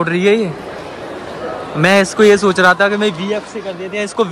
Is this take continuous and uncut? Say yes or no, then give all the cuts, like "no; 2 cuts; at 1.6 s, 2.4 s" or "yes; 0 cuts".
yes; 0 cuts